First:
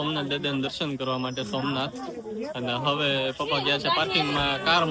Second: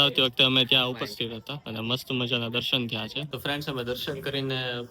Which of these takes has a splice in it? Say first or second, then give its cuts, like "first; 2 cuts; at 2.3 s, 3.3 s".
second; 2 cuts; at 1.6 s, 3.3 s